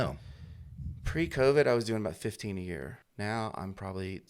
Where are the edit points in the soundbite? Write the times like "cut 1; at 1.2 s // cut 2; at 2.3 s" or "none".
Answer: cut 1; at 3.0 s

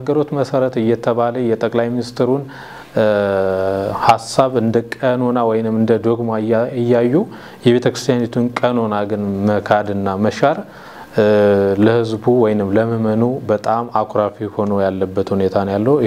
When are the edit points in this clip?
none

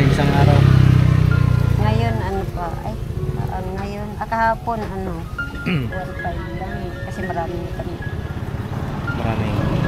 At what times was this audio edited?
none

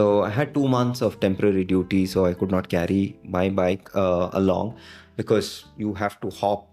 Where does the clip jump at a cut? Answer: none

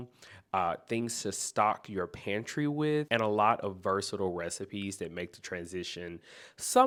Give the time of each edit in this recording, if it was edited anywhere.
none

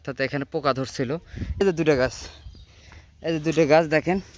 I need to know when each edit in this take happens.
cut 1; at 1.6 s

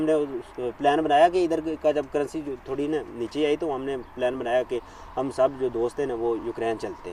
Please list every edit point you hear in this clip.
none

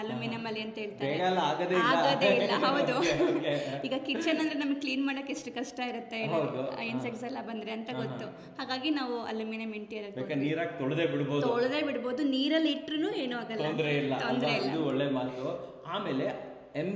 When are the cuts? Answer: none

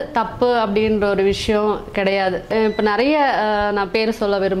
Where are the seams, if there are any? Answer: cut 1; at 2.5 s

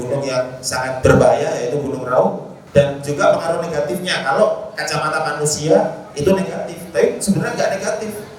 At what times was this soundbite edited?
cut 1; at 1.0 s // cut 2; at 2.5 s

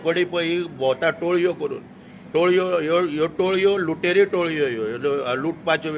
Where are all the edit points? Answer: none

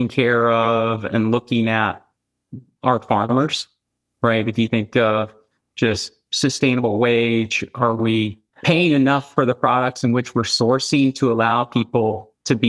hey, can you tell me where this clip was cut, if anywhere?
none

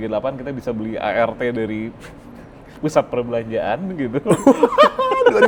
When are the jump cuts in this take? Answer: none

